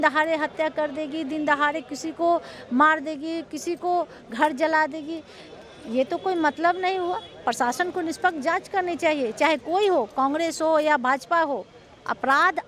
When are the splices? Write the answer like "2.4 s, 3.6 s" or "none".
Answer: none